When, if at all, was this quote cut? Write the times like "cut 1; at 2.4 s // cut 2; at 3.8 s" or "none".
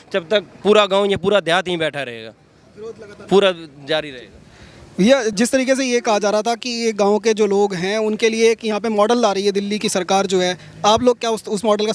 none